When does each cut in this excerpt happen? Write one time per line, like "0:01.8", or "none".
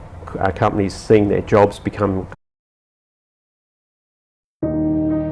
none